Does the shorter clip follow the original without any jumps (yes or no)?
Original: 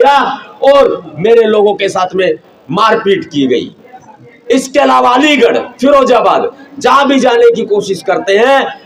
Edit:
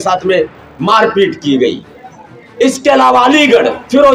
yes